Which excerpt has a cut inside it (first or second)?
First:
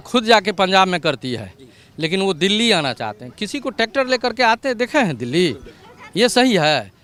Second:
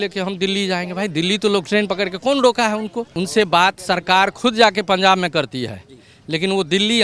second